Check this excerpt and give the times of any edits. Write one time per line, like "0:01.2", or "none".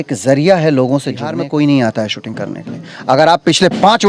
0:01.3